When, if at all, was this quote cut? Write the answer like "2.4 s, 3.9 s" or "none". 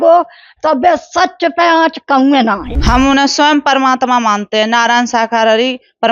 2.7 s